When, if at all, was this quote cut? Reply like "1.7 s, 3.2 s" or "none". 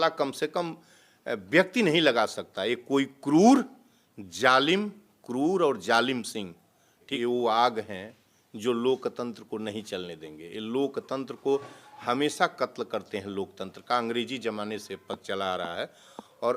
7.0 s